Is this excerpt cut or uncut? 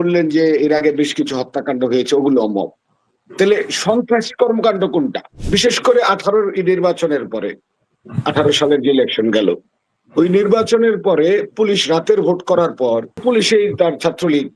cut